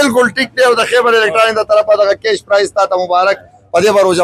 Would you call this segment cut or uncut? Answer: uncut